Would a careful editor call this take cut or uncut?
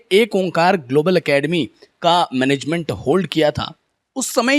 uncut